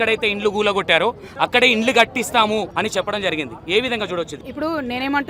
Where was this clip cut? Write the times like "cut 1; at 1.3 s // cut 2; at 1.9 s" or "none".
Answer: cut 1; at 2.7 s // cut 2; at 4.4 s